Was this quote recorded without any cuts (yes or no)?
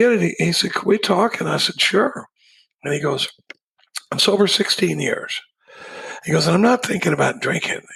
yes